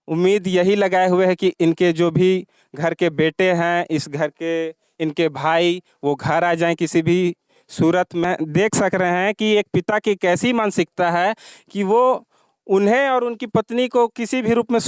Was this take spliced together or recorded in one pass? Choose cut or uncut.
cut